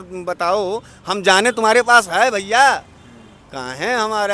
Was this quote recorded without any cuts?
yes; 0 cuts

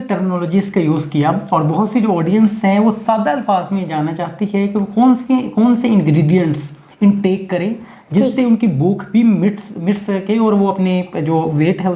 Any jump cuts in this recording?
no; 0 cuts

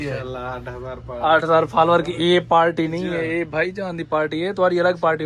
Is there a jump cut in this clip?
no; 0 cuts

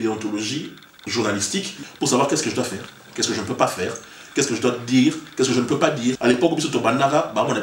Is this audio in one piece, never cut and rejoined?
no; 2 cuts; at 1.8 s, 6.2 s

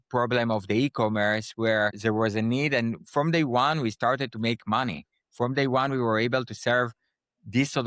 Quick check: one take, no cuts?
no; 1 cut; at 2.0 s

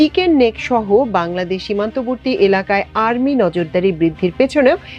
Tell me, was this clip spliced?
no; 0 cuts

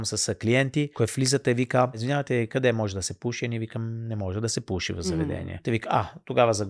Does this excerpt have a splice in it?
yes; 3 cuts; at 0.9 s, 2.0 s, 5.5 s

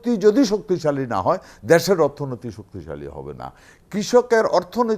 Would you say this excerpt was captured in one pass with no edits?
yes; 0 cuts

